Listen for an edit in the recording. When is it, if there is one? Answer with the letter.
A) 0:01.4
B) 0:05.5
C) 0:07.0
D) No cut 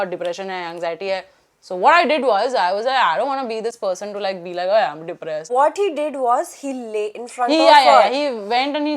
B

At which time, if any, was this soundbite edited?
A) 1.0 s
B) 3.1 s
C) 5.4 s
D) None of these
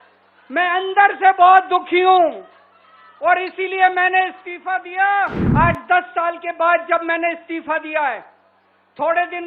C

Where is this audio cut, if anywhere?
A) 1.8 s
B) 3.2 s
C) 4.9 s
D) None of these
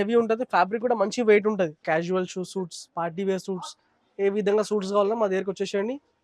A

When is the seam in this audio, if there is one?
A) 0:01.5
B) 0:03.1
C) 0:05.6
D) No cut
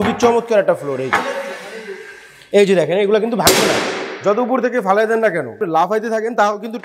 C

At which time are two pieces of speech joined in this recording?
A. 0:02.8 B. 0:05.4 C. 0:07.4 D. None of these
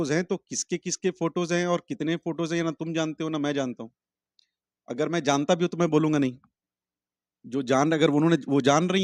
D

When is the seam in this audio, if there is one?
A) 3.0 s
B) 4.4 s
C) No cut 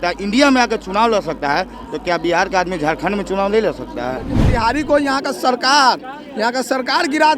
B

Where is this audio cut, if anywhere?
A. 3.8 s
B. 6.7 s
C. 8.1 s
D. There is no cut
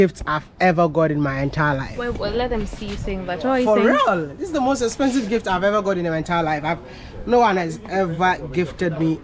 D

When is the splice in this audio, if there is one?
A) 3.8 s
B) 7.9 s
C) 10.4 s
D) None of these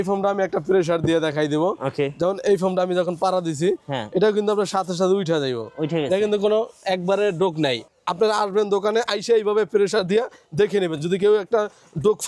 B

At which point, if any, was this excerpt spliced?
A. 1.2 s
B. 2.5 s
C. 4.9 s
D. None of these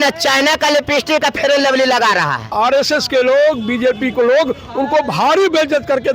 B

